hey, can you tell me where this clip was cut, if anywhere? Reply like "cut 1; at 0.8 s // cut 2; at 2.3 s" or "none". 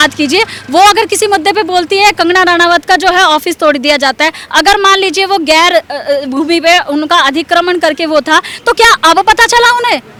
none